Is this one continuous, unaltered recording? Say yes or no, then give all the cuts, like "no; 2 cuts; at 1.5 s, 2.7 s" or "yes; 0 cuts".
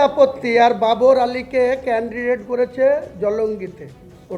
yes; 0 cuts